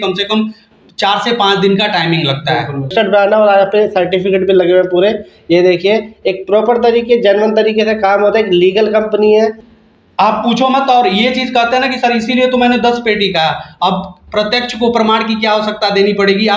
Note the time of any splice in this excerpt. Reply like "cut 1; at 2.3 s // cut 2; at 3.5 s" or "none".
cut 1; at 2.9 s // cut 2; at 9.6 s